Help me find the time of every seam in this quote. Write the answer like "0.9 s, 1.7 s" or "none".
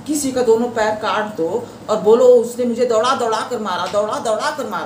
none